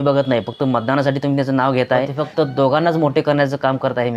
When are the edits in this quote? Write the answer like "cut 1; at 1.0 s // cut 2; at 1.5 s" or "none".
cut 1; at 2.2 s